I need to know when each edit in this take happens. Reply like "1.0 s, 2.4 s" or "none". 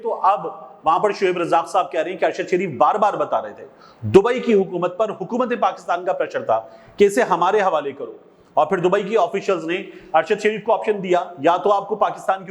none